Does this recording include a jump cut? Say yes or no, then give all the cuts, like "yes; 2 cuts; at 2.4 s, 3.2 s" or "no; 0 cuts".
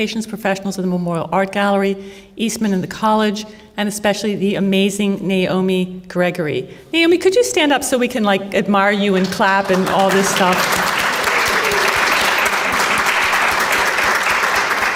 no; 0 cuts